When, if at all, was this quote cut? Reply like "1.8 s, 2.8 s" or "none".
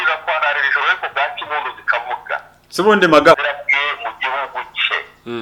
3.4 s